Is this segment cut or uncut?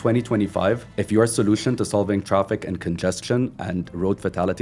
cut